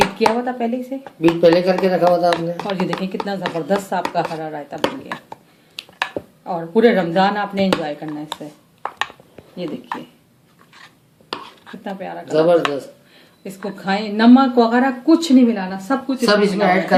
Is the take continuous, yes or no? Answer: yes